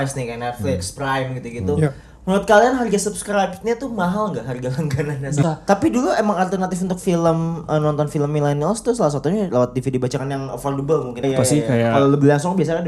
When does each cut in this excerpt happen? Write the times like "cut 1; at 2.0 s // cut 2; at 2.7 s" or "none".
cut 1; at 5.4 s // cut 2; at 11.2 s

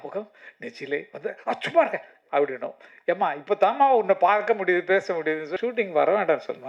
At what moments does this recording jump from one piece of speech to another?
cut 1; at 5.5 s

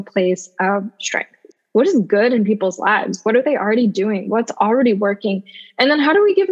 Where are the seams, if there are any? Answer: cut 1; at 1.4 s

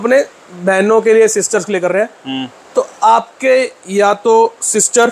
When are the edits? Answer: none

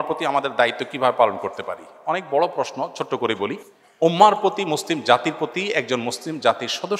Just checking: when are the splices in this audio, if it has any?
none

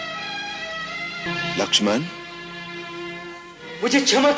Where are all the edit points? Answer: cut 1; at 1.3 s

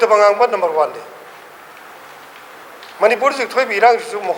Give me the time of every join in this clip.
none

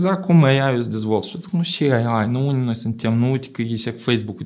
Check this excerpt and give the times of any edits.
none

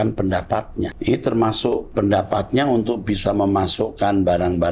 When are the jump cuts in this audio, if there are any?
cut 1; at 1.0 s // cut 2; at 1.9 s

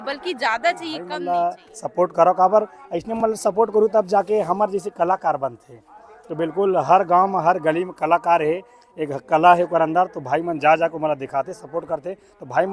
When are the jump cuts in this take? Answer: cut 1; at 1.1 s

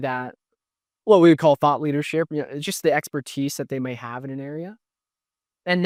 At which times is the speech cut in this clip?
none

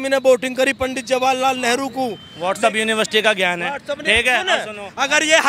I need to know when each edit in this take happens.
cut 1; at 2.3 s

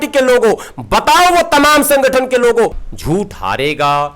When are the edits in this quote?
cut 1; at 2.8 s

